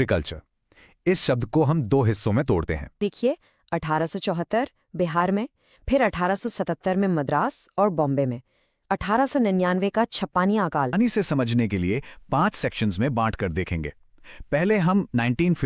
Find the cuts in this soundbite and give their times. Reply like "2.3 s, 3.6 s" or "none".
3.0 s, 10.9 s